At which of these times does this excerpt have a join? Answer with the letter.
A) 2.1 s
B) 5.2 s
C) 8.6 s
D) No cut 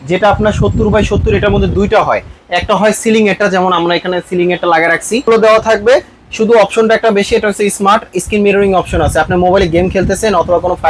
B